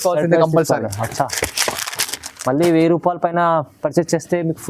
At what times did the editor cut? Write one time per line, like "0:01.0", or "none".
none